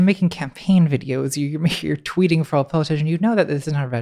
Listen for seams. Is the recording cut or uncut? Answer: uncut